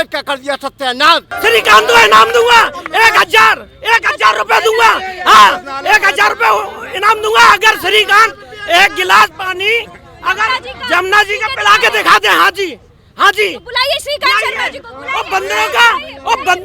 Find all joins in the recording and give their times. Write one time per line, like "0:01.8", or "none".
0:01.3